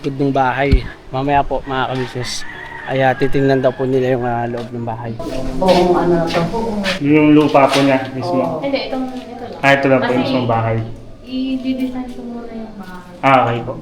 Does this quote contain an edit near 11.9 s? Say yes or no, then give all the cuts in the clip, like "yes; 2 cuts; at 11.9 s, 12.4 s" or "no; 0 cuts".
no; 2 cuts; at 1.0 s, 5.2 s